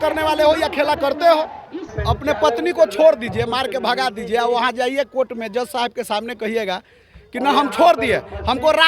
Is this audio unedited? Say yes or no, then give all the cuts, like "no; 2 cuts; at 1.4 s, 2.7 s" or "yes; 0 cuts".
no; 1 cut; at 1.9 s